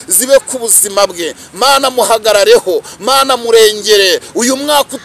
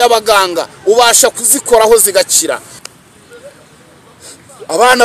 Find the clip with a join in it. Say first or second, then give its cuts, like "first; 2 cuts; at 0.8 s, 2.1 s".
second; 1 cut; at 2.8 s